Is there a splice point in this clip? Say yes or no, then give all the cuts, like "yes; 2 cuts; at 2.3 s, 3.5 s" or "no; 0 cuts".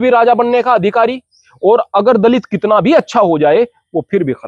no; 0 cuts